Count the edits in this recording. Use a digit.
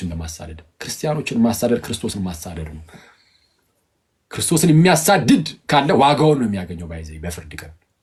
0